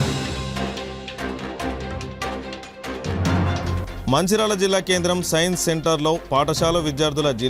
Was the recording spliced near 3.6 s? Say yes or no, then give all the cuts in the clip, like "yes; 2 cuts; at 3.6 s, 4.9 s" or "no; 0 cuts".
no; 2 cuts; at 0.8 s, 2.3 s